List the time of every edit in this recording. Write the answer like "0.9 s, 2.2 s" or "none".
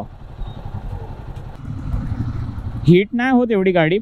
1.5 s